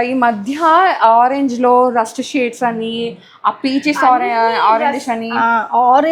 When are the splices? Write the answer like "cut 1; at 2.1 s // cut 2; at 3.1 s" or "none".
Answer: none